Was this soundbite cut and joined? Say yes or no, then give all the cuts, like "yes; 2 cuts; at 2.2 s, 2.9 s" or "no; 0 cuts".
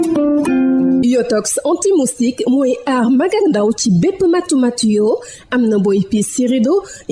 yes; 1 cut; at 1.0 s